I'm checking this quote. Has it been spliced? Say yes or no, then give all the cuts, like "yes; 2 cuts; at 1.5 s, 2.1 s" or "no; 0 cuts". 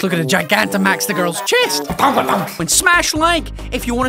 yes; 1 cut; at 2.6 s